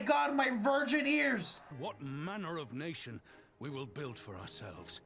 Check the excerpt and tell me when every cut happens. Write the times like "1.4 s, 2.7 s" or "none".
1.7 s

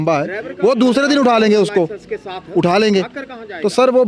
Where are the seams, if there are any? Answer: none

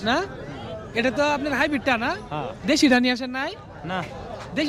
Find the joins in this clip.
none

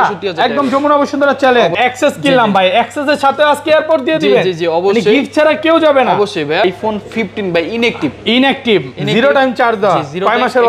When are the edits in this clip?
1.8 s, 6.6 s

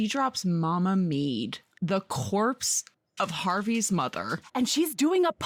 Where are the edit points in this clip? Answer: none

